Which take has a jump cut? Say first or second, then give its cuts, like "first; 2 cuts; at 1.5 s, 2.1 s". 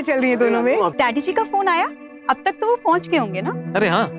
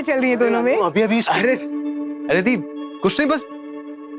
first; 1 cut; at 0.9 s